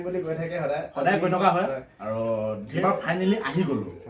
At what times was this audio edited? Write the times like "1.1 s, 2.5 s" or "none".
2.7 s

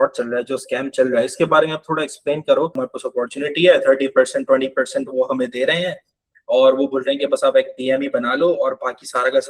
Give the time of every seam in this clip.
2.7 s

